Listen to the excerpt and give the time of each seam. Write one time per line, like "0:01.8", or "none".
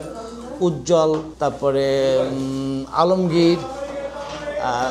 0:01.3